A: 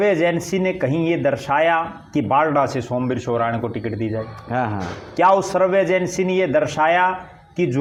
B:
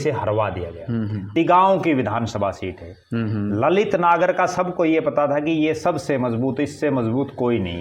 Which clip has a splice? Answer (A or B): B